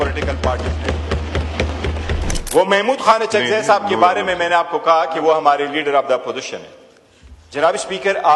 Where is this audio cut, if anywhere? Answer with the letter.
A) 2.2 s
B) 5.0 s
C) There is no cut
A